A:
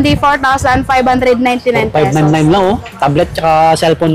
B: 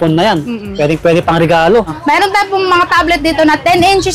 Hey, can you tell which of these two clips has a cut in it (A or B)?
B